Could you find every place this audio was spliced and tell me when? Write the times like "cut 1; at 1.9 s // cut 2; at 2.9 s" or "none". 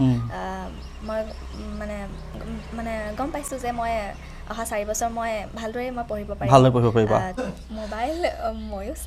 cut 1; at 7.4 s